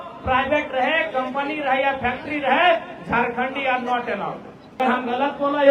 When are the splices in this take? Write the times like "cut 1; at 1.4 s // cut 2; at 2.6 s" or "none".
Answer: cut 1; at 4.8 s

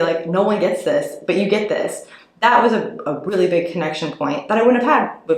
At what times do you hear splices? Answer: none

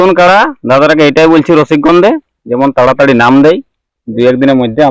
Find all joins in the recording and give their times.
none

